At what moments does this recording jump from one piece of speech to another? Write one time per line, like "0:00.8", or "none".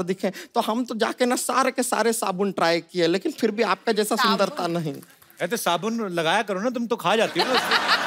none